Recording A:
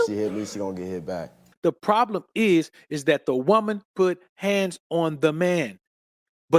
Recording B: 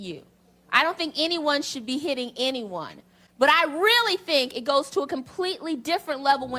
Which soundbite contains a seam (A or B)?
A